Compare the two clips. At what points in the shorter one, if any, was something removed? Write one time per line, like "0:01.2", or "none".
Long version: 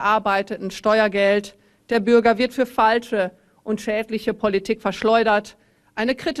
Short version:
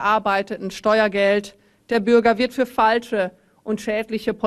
none